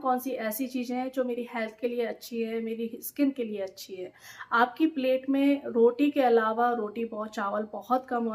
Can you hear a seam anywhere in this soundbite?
no; 0 cuts

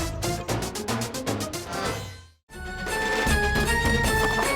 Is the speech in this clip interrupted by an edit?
yes; 1 cut; at 2.8 s

